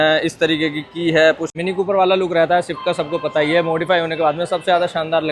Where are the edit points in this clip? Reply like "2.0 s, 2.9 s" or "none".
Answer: 1.5 s